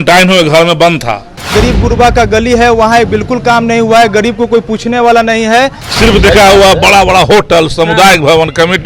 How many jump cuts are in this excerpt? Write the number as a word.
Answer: two